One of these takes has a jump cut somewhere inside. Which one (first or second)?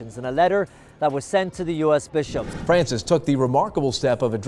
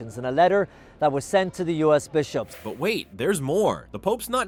first